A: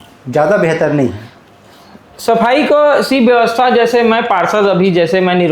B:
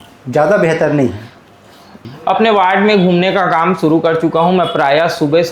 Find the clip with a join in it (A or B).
B